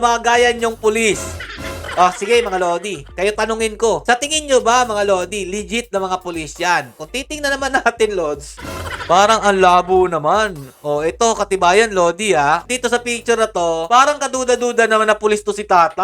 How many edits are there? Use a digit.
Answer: 0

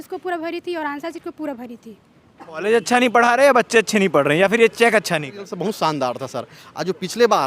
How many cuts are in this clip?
2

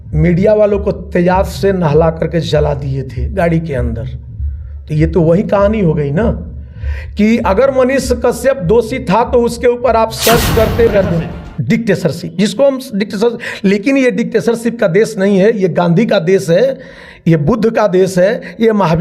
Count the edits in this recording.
1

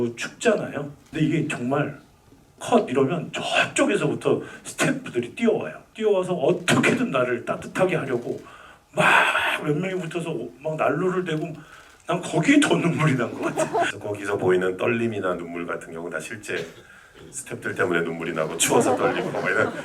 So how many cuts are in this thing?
3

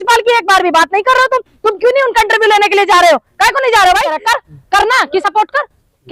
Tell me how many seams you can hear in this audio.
1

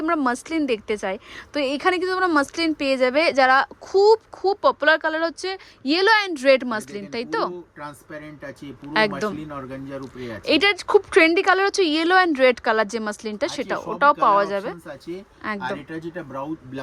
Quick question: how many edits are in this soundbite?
0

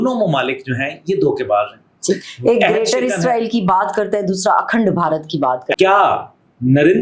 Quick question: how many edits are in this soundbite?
1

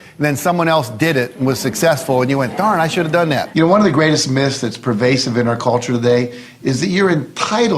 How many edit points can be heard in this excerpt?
1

